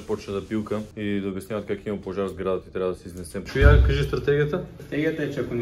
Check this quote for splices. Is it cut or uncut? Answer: cut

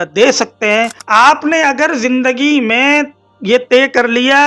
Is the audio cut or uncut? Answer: cut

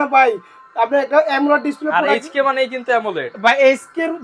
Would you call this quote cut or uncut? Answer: uncut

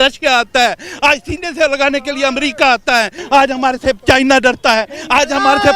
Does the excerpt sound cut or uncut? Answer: cut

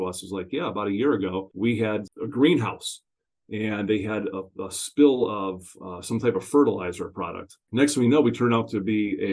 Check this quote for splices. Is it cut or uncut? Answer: cut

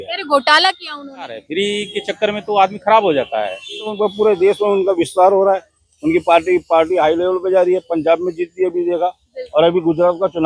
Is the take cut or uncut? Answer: cut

